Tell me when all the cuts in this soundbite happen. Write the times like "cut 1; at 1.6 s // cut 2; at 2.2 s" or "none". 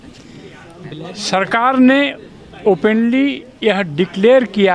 none